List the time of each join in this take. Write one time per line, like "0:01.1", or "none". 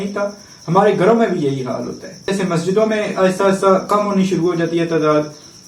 0:02.3